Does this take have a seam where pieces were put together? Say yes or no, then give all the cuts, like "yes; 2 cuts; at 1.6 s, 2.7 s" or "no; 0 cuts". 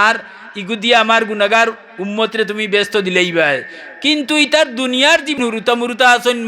yes; 1 cut; at 5.4 s